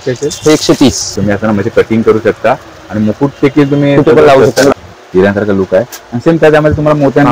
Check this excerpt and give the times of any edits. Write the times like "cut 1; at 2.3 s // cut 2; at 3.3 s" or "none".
cut 1; at 1.2 s // cut 2; at 4.7 s